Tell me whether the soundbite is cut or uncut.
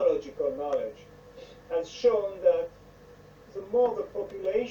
uncut